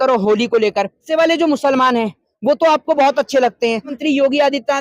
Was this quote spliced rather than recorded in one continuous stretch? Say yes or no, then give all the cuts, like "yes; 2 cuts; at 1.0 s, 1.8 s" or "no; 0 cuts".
yes; 2 cuts; at 1.1 s, 3.9 s